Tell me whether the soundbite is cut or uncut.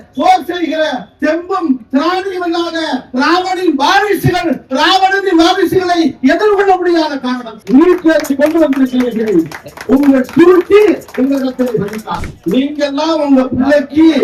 uncut